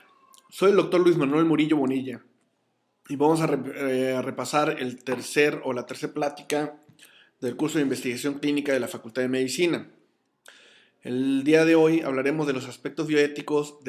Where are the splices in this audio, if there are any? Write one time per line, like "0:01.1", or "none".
none